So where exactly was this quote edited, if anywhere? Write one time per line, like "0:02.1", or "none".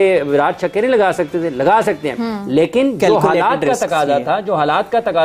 none

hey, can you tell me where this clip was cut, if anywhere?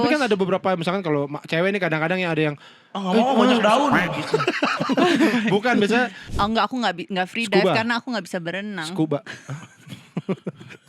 0:06.2

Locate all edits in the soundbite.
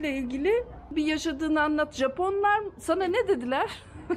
0:00.9

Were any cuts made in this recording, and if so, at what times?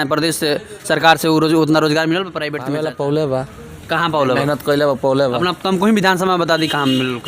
0:02.5

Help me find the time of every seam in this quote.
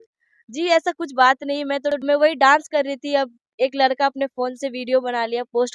0:01.9

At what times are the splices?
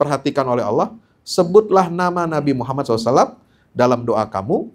none

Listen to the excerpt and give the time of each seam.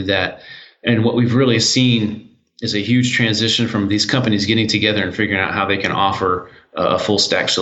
none

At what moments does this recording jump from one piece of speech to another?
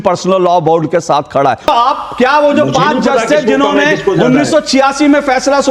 0:01.7

